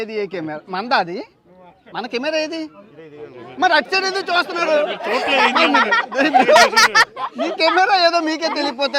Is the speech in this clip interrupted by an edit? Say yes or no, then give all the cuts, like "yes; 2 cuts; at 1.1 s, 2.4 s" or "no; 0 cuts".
no; 0 cuts